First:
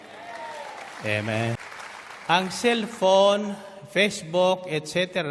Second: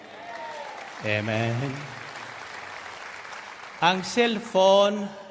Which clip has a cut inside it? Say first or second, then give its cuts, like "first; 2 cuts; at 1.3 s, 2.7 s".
first; 1 cut; at 1.6 s